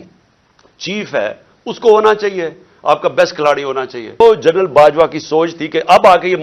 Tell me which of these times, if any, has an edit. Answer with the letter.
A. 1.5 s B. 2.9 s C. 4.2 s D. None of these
C